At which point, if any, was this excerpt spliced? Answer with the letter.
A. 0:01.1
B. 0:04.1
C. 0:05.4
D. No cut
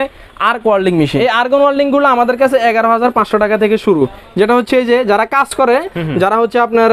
A